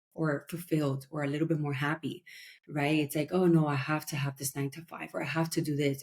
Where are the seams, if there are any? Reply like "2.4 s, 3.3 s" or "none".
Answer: none